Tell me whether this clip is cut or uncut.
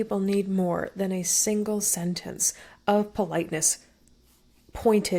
uncut